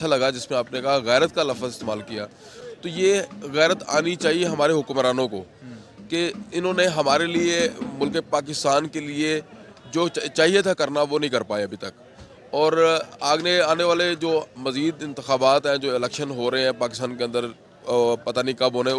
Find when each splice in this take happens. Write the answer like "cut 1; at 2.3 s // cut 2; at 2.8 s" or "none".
none